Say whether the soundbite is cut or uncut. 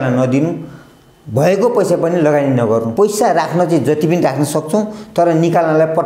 cut